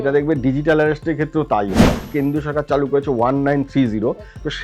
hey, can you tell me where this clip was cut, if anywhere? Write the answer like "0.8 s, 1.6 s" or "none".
2.1 s